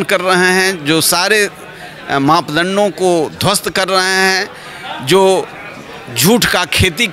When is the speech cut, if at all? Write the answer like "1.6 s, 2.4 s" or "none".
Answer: none